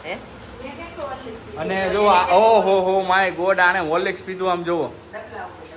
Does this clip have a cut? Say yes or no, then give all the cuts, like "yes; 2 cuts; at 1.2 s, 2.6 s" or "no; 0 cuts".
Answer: no; 0 cuts